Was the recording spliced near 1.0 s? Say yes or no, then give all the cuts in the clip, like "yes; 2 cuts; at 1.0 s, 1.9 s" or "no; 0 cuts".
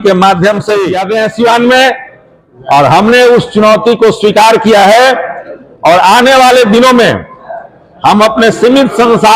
yes; 1 cut; at 1.0 s